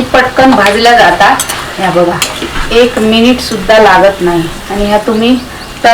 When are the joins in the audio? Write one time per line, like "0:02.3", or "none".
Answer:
0:02.5
0:04.6